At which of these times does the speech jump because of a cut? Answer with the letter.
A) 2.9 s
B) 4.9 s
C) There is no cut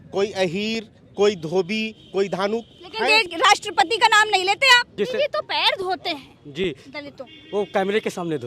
B